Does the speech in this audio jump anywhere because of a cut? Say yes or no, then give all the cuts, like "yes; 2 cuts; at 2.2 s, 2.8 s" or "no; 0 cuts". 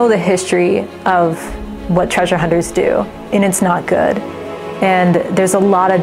no; 0 cuts